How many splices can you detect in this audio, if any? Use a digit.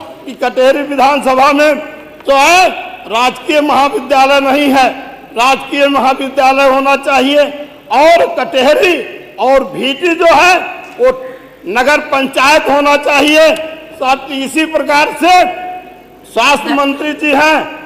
0